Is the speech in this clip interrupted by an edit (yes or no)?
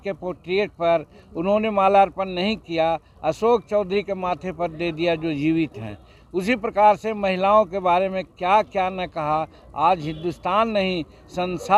no